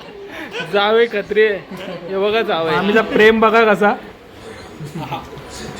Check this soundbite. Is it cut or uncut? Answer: cut